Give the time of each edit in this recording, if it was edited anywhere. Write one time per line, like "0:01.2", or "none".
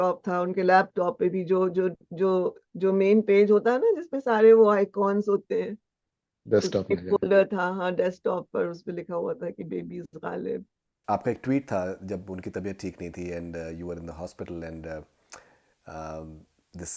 0:10.9